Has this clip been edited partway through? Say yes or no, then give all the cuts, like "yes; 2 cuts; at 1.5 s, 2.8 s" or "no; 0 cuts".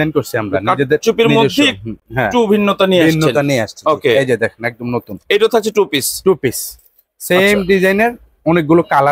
no; 0 cuts